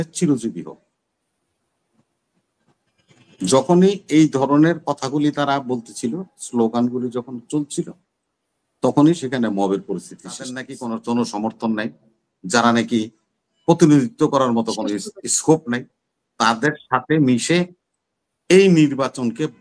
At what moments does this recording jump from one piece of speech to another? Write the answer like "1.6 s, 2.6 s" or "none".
10.7 s